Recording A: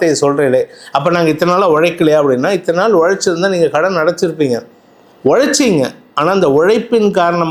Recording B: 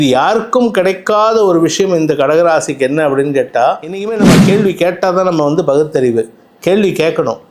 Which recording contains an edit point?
B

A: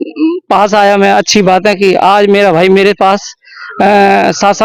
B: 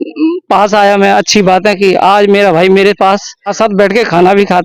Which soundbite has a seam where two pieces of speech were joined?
B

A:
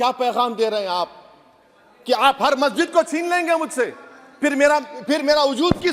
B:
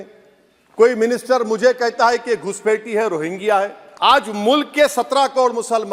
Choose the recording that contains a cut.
B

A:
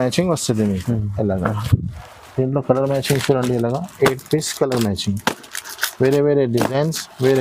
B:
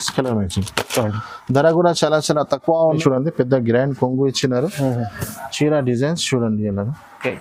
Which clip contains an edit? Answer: B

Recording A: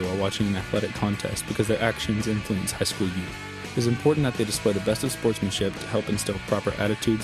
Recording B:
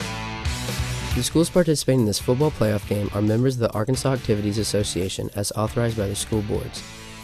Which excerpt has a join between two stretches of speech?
B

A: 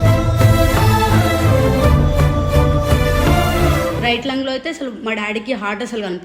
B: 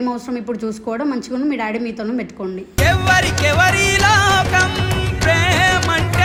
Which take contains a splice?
A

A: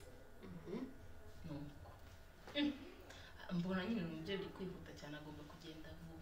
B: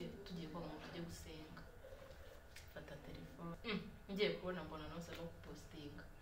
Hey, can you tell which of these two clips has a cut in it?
B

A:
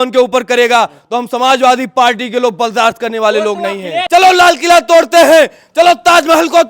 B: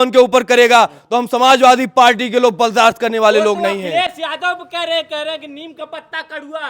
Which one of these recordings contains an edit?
A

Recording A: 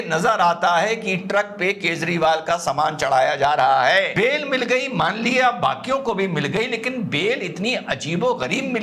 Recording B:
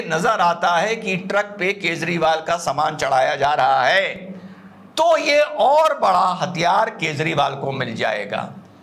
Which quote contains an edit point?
A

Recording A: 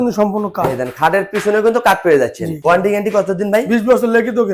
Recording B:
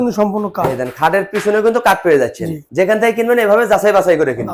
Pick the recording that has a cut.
A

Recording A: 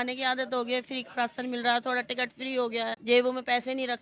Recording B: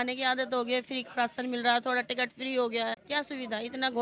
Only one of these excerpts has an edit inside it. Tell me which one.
B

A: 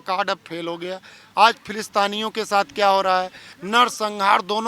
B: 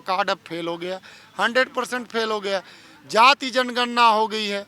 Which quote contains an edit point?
A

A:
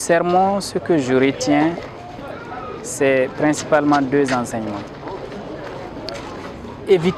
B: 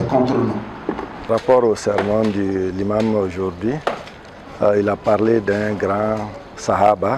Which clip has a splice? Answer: B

